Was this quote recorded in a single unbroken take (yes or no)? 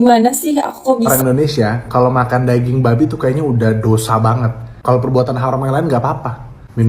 no